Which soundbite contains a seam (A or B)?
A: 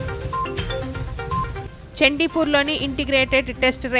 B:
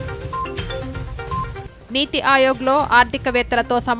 B